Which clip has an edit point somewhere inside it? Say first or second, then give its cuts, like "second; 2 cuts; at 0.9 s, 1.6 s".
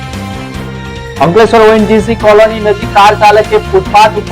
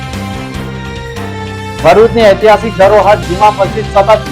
second; 1 cut; at 1.2 s